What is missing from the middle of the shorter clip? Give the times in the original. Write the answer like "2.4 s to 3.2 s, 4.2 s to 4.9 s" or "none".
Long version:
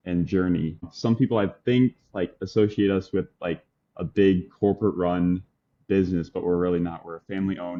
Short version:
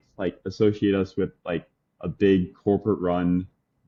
none